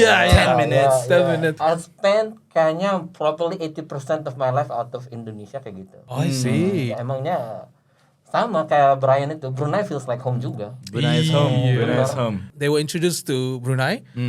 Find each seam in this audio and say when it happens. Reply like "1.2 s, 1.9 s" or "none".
1.6 s, 5.9 s, 6.9 s, 12.5 s